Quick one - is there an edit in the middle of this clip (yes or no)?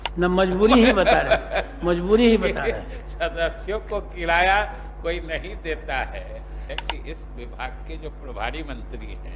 yes